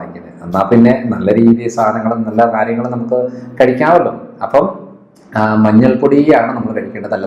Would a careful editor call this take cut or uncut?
uncut